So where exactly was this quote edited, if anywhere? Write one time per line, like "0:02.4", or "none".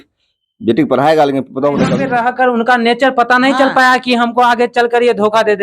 0:02.0